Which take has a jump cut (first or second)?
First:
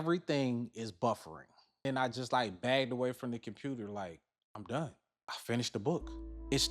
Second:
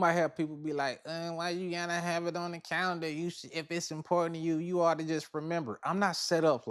first